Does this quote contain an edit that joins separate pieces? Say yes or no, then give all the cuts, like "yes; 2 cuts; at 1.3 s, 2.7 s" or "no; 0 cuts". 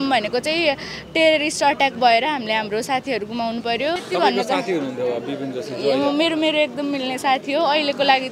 yes; 1 cut; at 4.0 s